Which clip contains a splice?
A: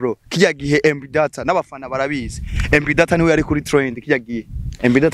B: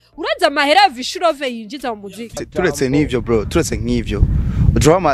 B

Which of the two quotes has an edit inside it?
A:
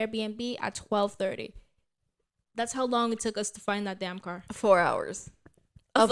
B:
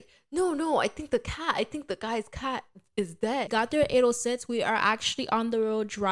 B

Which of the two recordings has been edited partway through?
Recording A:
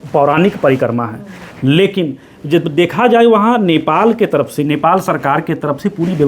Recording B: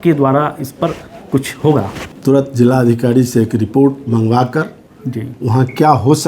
B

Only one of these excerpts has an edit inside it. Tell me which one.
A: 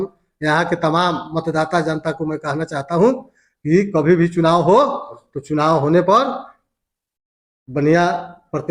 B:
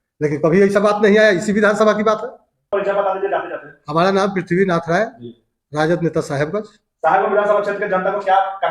B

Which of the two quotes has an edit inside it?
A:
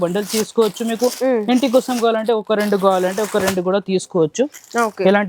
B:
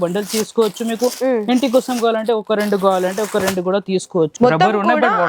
B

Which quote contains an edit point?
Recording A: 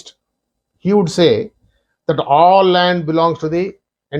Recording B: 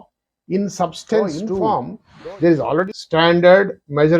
B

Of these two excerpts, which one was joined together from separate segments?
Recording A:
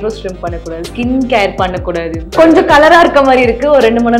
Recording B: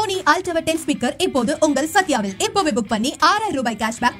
A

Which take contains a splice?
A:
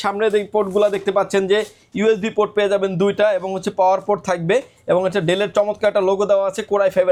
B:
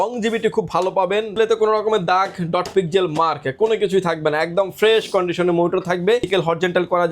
B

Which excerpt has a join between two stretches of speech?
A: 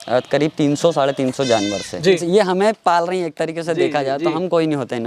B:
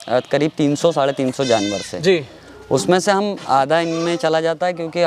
A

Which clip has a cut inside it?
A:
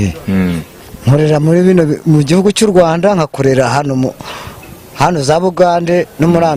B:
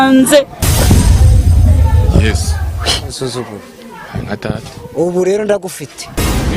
B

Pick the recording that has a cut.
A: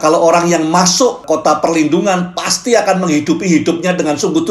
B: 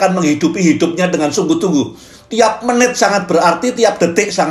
A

